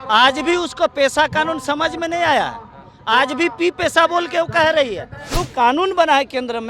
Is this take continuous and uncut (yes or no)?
no